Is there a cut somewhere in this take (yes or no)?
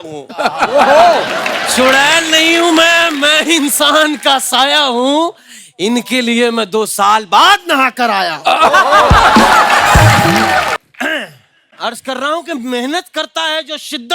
yes